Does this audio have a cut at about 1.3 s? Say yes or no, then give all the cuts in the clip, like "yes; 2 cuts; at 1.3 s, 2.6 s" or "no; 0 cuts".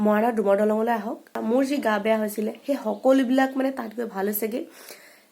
yes; 1 cut; at 1.3 s